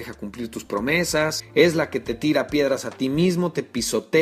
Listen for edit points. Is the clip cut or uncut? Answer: cut